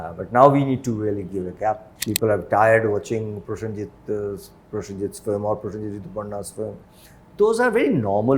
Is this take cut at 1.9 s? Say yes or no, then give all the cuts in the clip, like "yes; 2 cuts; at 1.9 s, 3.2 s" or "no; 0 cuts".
yes; 1 cut; at 1.9 s